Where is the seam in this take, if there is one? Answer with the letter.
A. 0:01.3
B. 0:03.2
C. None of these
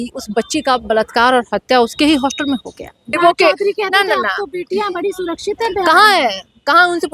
B